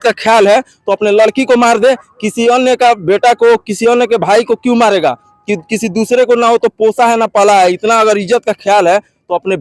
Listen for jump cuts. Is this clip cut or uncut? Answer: uncut